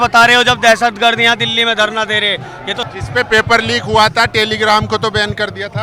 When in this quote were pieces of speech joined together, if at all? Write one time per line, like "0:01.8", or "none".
0:02.9